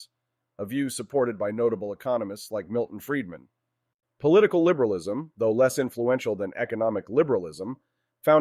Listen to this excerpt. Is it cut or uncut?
cut